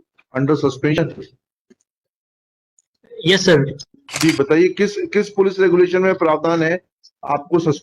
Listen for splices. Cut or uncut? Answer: cut